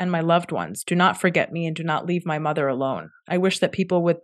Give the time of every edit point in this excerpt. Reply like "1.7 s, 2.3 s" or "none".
none